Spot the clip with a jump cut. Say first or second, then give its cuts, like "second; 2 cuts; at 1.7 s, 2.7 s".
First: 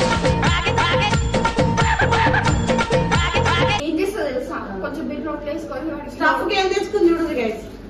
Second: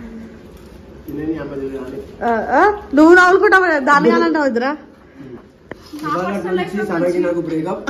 first; 1 cut; at 3.8 s